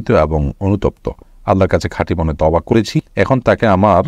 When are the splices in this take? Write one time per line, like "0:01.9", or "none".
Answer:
0:02.9